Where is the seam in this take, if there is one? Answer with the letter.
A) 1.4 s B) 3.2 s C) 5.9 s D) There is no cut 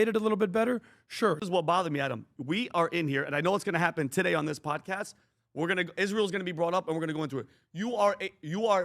A